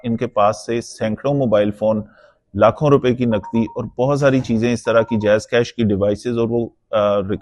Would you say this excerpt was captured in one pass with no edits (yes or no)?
yes